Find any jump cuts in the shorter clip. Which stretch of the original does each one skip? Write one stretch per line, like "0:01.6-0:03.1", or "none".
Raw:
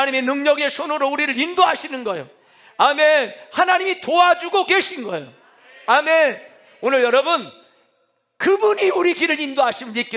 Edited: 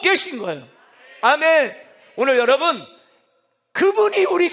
none